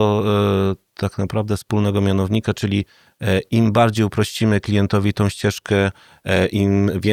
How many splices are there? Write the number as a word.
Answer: zero